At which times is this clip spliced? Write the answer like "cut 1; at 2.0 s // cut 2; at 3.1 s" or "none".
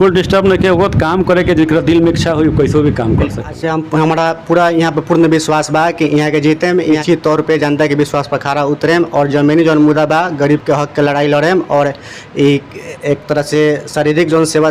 cut 1; at 3.6 s // cut 2; at 7.0 s